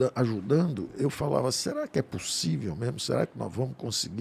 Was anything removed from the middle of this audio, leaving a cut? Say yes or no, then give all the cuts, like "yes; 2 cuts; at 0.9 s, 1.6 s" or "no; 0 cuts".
no; 0 cuts